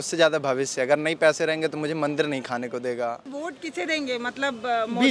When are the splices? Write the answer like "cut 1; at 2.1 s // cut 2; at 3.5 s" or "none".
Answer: cut 1; at 3.4 s

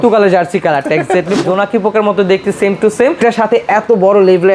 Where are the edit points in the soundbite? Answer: cut 1; at 1.4 s // cut 2; at 3.2 s

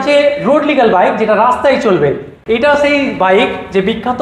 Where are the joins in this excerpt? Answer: none

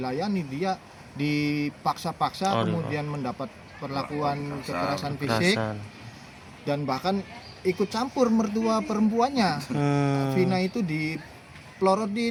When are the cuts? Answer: none

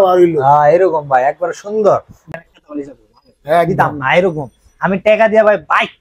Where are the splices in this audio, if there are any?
cut 1; at 2.3 s

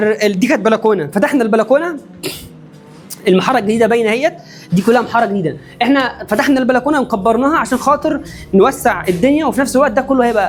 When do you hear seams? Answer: none

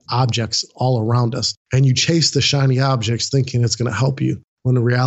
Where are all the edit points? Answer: cut 1; at 1.6 s

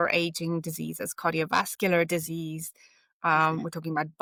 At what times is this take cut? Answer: none

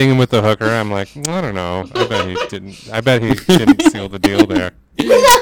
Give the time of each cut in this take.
none

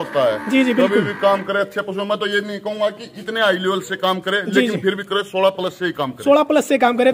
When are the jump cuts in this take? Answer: none

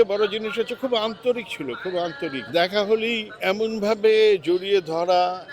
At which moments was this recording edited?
cut 1; at 2.4 s // cut 2; at 3.4 s

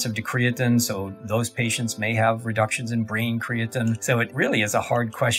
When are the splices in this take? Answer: cut 1; at 4.2 s

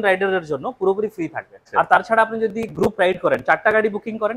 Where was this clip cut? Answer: cut 1; at 1.6 s

